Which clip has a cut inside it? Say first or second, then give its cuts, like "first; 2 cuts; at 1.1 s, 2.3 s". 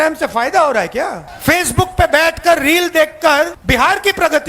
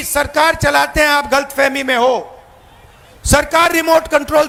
first; 2 cuts; at 1.3 s, 3.6 s